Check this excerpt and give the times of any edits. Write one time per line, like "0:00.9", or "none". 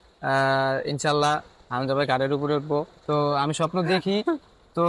0:03.1